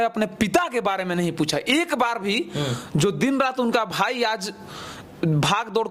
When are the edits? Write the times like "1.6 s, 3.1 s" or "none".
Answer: none